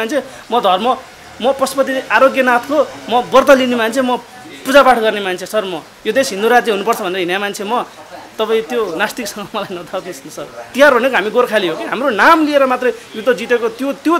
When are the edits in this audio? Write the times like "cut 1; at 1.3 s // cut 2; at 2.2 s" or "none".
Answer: cut 1; at 10.7 s